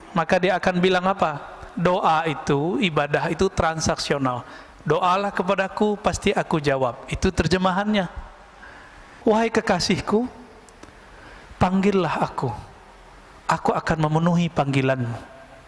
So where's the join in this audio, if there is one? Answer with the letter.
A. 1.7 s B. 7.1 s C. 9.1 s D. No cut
C